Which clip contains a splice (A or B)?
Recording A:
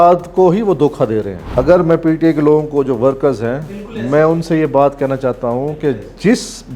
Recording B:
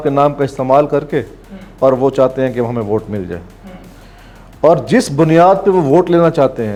A